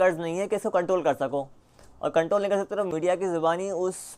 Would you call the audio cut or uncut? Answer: cut